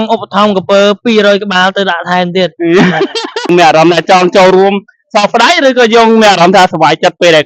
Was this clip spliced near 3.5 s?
yes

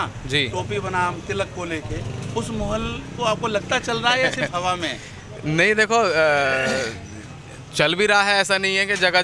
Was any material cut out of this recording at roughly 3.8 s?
no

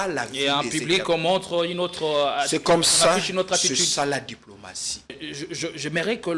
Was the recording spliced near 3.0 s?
no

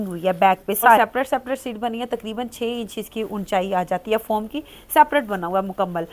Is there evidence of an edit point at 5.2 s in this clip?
no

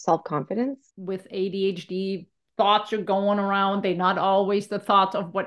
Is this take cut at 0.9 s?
yes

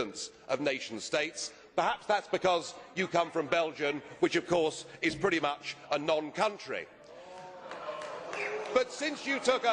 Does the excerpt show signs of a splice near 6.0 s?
yes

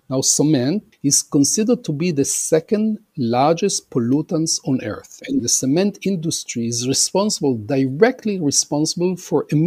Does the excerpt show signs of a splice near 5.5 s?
yes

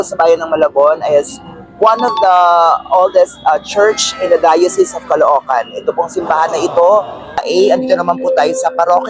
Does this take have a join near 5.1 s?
no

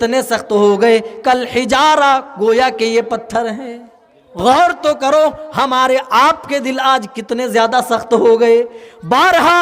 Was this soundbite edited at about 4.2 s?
yes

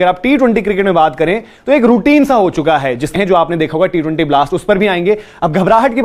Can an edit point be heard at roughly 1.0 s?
no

